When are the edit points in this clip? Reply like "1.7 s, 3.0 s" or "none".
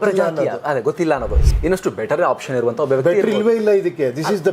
1.4 s